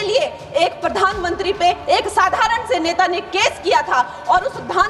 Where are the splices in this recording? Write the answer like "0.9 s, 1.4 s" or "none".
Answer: none